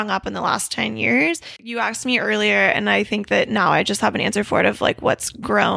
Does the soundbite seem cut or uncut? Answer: cut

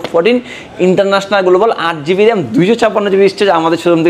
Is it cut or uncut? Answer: uncut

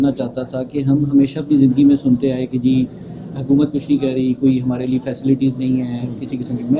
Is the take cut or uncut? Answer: uncut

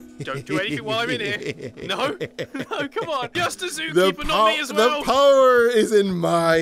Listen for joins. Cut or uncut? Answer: cut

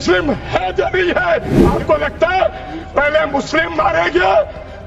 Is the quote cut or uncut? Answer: cut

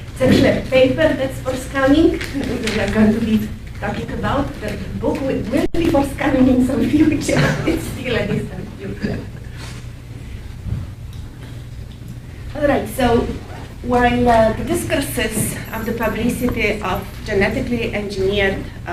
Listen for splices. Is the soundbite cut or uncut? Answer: uncut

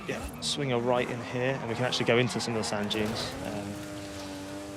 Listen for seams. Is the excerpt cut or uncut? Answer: uncut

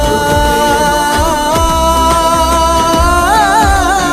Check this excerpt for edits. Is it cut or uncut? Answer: uncut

